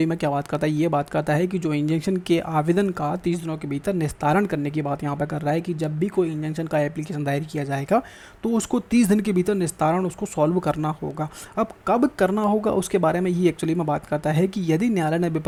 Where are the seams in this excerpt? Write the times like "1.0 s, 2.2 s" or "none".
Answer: none